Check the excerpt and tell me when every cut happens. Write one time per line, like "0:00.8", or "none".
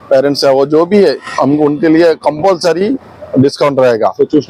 none

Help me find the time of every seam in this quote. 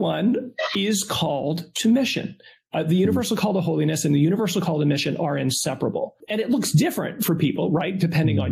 0:06.2

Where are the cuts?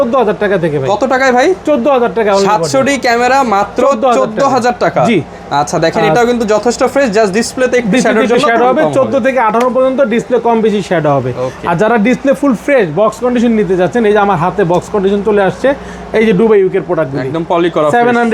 none

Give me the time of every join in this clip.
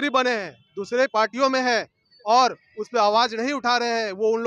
none

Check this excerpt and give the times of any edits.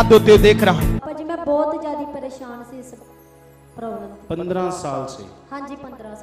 0:01.0

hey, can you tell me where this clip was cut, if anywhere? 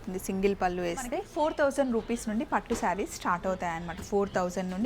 0:01.3

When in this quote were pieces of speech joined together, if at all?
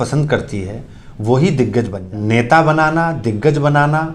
0:02.0

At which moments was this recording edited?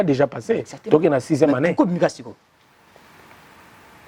none

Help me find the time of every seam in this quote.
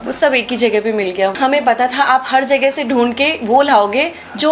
0:01.3

